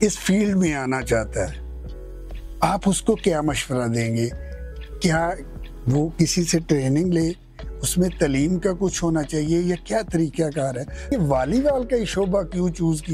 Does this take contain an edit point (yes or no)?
yes